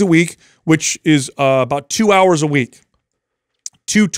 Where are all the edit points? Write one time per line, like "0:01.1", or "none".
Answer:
none